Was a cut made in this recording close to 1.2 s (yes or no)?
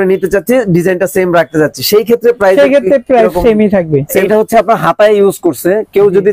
no